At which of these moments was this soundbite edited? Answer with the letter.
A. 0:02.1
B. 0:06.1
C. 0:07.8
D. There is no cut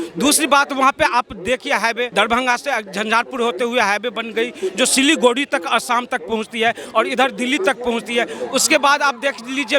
A